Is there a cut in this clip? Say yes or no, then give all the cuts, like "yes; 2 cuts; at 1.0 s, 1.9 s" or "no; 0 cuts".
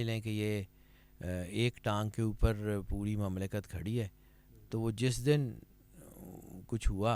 no; 0 cuts